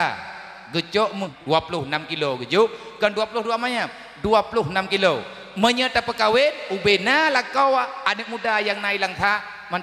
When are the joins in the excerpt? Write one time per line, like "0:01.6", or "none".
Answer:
0:01.3